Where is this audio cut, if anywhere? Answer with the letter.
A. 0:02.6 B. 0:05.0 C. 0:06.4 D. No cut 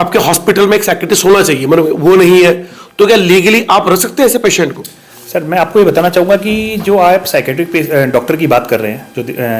D